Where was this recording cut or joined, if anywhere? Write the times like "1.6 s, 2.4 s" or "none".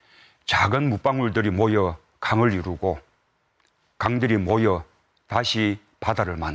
5.5 s